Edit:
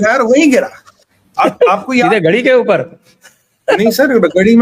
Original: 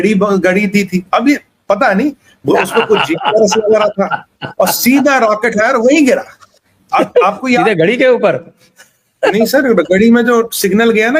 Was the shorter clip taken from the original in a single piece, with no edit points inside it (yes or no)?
yes